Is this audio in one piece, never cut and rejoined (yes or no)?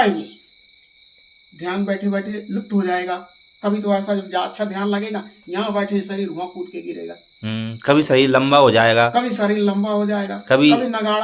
yes